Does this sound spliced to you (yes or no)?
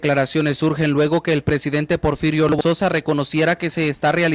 no